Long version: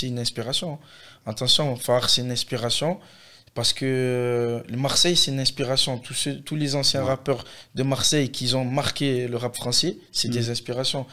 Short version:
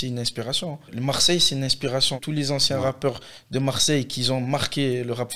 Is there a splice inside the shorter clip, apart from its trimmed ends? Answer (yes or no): yes